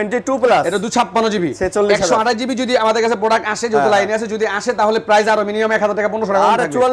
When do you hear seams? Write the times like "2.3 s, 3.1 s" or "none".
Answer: none